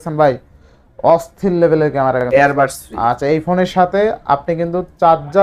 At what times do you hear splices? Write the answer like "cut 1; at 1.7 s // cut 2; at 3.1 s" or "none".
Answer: cut 1; at 2.2 s